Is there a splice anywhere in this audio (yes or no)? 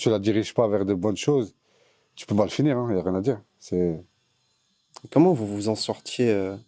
no